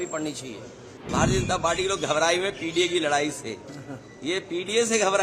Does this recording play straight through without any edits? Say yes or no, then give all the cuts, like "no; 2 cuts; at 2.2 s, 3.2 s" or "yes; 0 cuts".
no; 1 cut; at 1.0 s